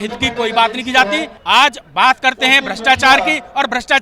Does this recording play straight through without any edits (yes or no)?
no